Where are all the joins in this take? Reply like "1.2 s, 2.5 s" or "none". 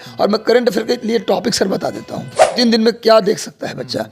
2.6 s